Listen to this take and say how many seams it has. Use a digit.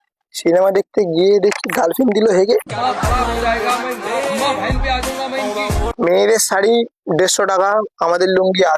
1